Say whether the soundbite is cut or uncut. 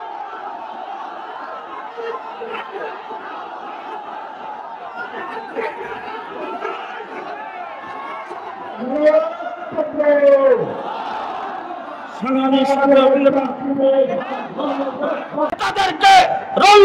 cut